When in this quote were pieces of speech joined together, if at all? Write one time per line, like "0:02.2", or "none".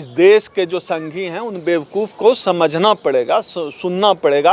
none